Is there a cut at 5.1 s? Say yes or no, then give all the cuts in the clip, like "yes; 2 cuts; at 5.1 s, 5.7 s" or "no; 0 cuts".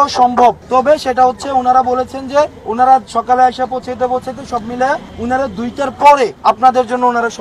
yes; 4 cuts; at 1.1 s, 2.6 s, 5.1 s, 6.4 s